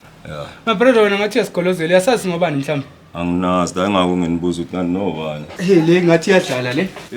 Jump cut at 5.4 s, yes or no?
yes